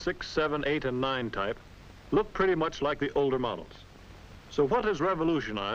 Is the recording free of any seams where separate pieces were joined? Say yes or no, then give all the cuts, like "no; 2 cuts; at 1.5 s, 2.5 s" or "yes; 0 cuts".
yes; 0 cuts